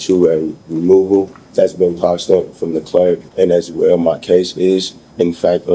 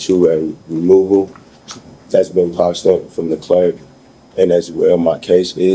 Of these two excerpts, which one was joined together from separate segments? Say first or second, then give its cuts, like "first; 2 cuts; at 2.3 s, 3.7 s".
first; 2 cuts; at 1.4 s, 3.3 s